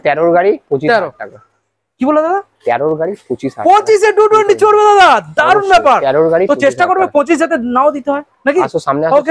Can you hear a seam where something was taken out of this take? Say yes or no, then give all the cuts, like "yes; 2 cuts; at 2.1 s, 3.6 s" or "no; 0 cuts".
no; 0 cuts